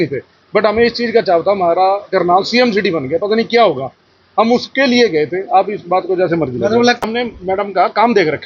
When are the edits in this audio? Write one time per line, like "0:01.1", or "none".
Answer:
0:07.0